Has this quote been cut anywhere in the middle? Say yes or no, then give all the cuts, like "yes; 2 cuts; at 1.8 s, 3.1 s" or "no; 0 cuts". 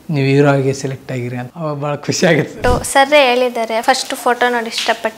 yes; 3 cuts; at 1.4 s, 2.5 s, 3.8 s